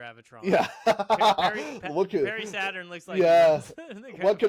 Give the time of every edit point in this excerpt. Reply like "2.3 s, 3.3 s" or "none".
none